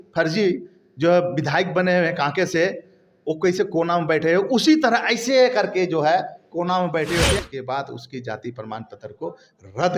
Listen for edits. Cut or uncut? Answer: cut